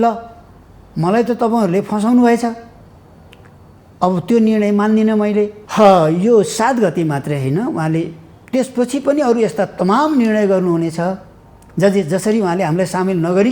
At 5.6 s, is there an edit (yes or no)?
yes